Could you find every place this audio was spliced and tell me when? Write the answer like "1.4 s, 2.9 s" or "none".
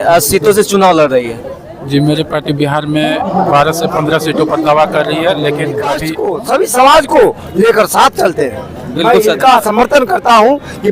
6.2 s